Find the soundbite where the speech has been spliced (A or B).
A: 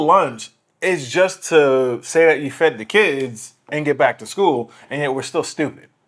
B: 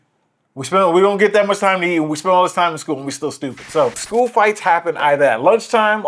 B